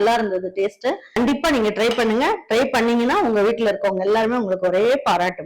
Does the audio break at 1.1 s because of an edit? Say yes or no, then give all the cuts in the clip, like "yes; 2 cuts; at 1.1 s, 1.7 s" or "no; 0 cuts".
yes; 1 cut; at 1.1 s